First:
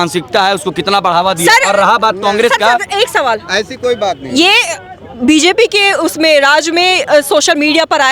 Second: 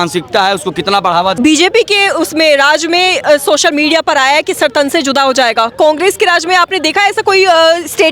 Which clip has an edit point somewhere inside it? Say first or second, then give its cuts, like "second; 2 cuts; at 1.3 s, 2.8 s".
second; 1 cut; at 1.3 s